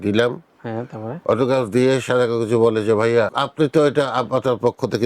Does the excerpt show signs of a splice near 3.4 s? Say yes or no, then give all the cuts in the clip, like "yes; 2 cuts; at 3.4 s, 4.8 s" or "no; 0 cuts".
yes; 1 cut; at 3.4 s